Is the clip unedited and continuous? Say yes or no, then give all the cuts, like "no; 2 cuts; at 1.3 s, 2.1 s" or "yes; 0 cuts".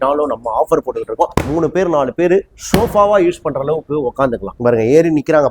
no; 2 cuts; at 1.3 s, 4.5 s